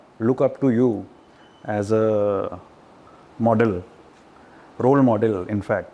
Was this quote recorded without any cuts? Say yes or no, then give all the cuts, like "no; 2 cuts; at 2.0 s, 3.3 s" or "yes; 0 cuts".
yes; 0 cuts